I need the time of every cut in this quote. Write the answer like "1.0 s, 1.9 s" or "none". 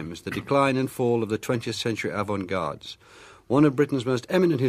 2.0 s